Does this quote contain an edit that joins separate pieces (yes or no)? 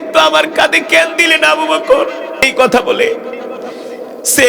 yes